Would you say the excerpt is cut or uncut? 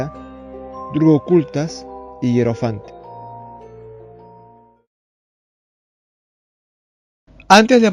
cut